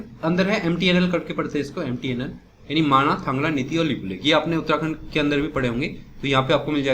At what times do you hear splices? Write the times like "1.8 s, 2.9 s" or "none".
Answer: none